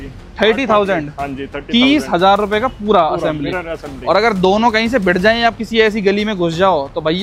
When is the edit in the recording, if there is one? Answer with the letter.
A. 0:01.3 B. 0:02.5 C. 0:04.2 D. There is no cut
D